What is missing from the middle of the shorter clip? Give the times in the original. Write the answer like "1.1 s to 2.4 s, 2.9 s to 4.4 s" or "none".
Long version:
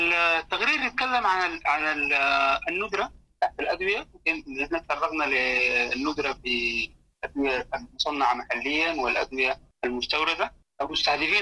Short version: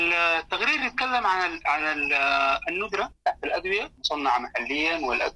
3.1 s to 3.3 s, 4.1 s to 7.9 s